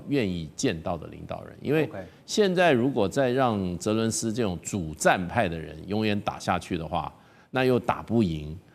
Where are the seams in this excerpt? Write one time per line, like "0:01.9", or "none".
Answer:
none